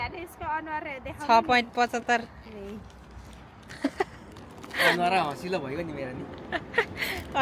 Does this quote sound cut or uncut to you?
uncut